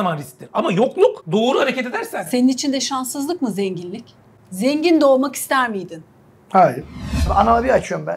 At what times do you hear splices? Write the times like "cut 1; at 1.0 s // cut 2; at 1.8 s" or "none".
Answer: cut 1; at 1.2 s // cut 2; at 7.3 s